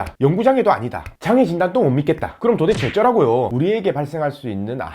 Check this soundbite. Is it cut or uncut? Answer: cut